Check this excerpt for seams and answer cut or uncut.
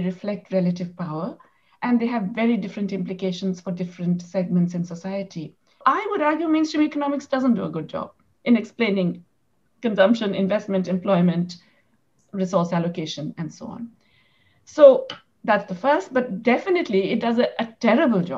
cut